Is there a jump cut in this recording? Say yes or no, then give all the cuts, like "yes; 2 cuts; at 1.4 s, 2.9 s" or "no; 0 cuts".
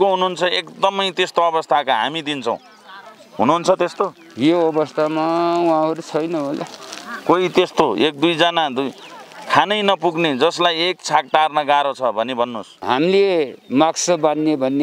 yes; 1 cut; at 12.7 s